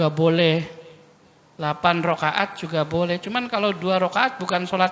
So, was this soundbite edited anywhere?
no; 0 cuts

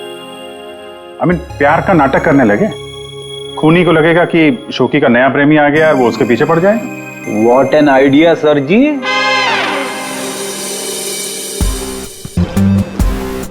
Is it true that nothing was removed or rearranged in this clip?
no; 1 cut; at 12.4 s

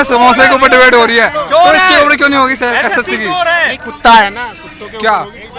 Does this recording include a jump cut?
no; 0 cuts

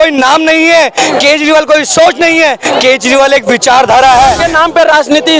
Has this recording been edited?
yes; 1 cut; at 4.4 s

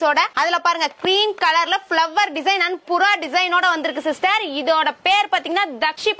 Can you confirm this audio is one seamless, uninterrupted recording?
yes; 0 cuts

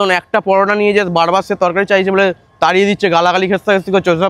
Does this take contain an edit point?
no; 0 cuts

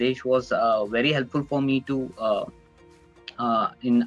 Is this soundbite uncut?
yes; 0 cuts

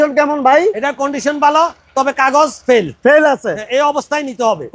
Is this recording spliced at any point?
no; 0 cuts

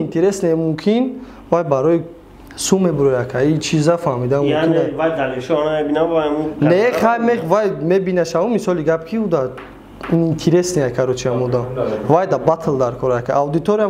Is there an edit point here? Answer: no; 0 cuts

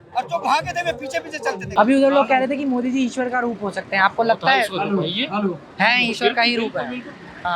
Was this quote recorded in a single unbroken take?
no; 1 cut; at 1.6 s

